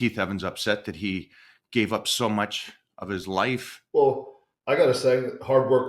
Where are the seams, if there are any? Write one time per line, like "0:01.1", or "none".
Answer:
0:03.8